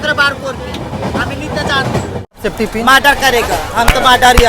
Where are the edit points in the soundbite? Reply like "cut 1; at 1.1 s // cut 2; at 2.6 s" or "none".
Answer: cut 1; at 2.4 s